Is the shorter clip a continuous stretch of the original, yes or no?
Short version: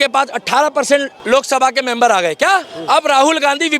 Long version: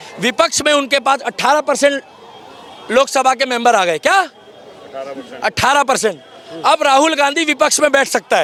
no